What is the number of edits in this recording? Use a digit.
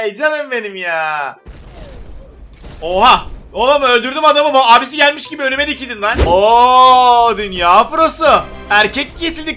1